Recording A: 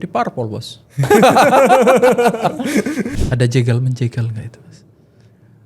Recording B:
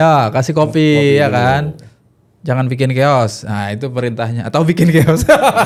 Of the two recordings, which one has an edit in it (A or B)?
A